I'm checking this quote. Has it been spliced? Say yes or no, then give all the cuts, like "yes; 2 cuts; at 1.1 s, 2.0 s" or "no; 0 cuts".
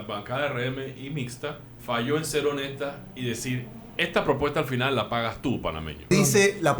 yes; 2 cuts; at 1.7 s, 6.1 s